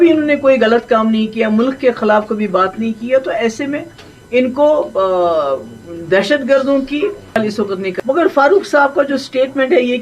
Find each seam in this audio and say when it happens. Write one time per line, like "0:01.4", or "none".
0:07.2